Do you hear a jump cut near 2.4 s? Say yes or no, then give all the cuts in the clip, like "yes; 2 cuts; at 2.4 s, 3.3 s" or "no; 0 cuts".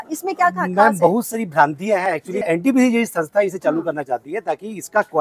yes; 1 cut; at 2.4 s